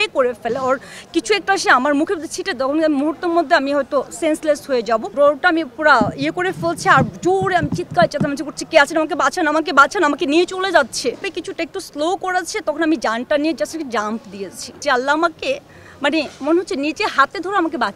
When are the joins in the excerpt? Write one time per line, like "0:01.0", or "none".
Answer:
0:05.1
0:11.3
0:14.8